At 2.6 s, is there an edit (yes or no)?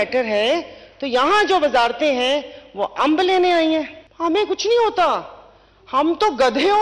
no